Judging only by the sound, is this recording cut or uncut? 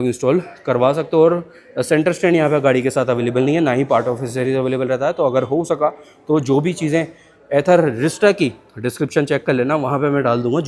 uncut